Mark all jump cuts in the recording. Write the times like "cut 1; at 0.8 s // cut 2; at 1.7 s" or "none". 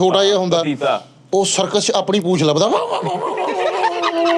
cut 1; at 1.1 s